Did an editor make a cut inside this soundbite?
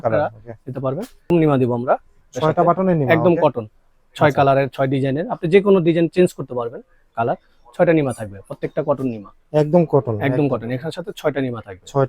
yes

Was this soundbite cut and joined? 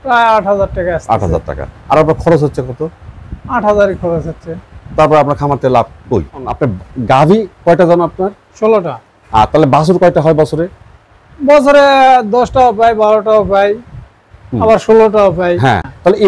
no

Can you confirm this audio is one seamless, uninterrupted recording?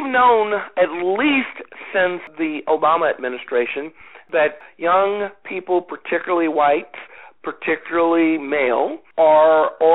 no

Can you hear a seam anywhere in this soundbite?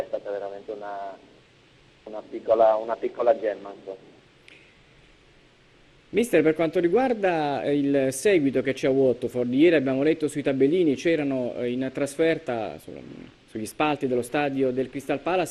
no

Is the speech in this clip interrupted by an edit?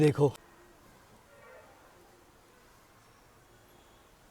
no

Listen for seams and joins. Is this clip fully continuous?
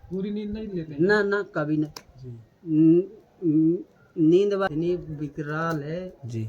no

